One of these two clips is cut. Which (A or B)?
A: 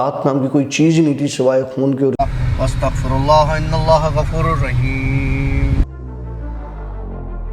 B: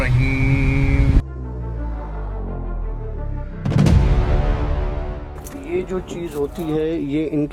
A